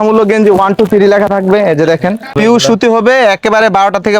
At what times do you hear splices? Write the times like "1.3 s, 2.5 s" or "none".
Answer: 2.4 s